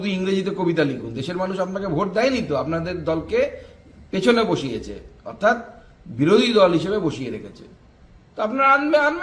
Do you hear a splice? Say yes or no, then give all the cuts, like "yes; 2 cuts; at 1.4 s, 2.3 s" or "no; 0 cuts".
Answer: no; 0 cuts